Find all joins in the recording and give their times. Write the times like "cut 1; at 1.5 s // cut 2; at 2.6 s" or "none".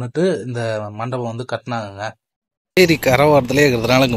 cut 1; at 2.8 s